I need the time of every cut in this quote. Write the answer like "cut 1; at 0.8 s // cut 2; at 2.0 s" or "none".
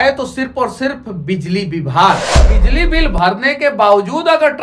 cut 1; at 2.6 s